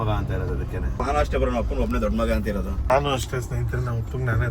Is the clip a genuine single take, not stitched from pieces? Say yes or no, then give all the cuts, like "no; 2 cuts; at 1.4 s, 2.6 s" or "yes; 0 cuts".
no; 2 cuts; at 1.0 s, 2.9 s